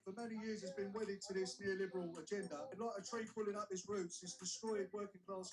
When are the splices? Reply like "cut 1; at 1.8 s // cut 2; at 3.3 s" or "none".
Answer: cut 1; at 2.8 s